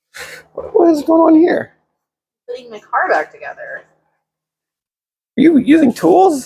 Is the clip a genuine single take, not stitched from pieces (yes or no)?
yes